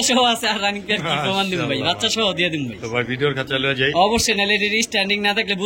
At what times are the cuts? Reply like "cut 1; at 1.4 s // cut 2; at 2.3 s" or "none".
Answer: none